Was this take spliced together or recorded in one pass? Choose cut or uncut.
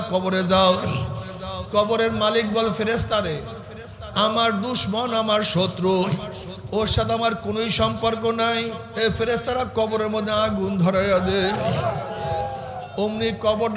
cut